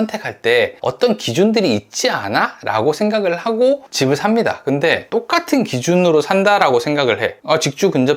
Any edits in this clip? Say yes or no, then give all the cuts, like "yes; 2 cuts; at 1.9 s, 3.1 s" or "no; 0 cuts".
no; 0 cuts